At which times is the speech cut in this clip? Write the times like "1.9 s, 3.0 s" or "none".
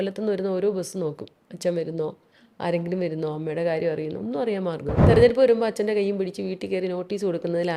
5.0 s